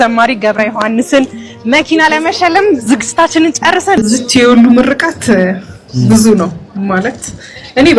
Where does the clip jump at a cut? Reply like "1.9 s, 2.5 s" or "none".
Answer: 4.0 s